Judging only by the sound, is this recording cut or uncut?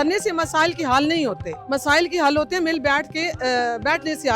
cut